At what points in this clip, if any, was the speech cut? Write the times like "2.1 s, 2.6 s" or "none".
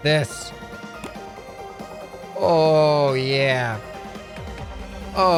none